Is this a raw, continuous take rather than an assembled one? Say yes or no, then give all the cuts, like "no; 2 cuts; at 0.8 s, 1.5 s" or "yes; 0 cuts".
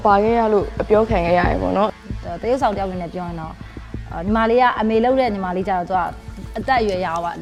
yes; 0 cuts